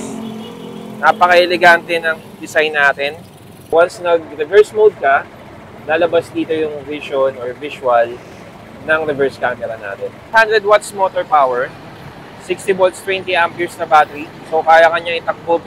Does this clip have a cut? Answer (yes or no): yes